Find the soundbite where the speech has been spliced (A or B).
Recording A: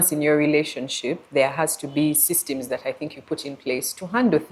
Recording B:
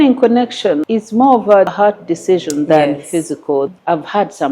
B